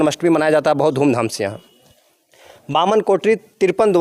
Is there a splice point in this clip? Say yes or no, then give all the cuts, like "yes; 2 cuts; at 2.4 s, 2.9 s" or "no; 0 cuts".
no; 0 cuts